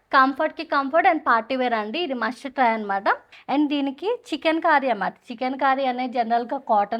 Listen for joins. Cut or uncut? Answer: cut